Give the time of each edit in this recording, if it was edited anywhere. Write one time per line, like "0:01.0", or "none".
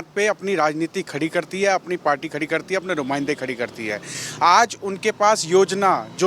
none

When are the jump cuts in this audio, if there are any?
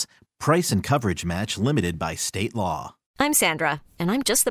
0:03.0

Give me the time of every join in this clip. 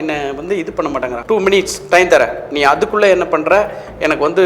0:01.2

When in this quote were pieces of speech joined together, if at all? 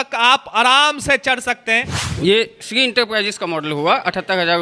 0:02.0

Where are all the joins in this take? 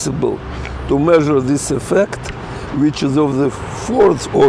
none

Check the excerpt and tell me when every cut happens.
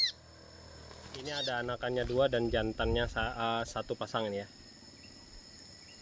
0:01.2

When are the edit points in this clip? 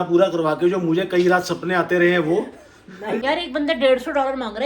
0:02.6

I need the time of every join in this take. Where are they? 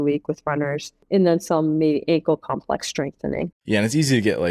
0:00.9
0:03.6

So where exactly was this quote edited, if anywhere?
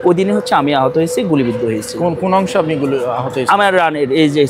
none

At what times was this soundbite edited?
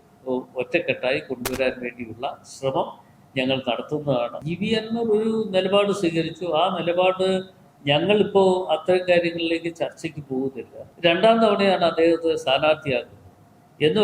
0:04.4
0:10.8

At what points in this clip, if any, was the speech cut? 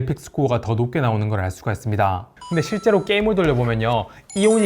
0:02.4

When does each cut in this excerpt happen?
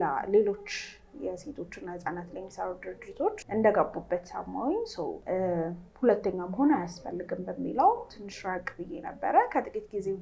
0:03.4
0:05.2

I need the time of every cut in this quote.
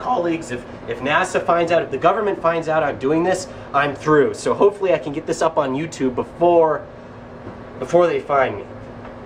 none

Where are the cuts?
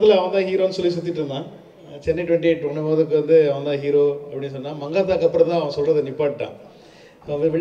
none

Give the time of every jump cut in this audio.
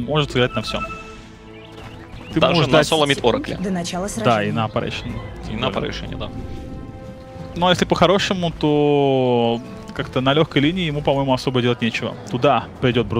0:03.1

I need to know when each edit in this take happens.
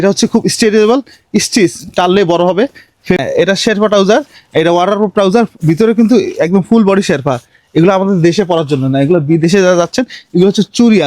0:03.2

